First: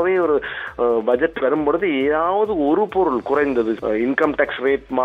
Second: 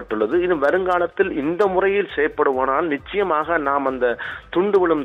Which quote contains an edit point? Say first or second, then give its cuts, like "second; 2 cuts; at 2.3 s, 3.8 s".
first; 1 cut; at 3.8 s